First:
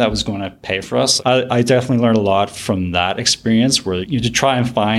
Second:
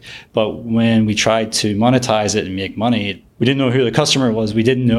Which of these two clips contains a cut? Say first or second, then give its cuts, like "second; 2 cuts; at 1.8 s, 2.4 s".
first; 1 cut; at 4.0 s